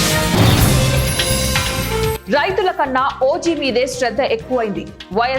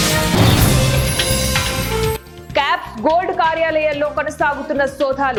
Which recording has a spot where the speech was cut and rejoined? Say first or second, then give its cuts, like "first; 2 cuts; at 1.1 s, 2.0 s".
first; 1 cut; at 2.2 s